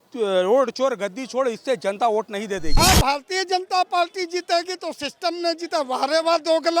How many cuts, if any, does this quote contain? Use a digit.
1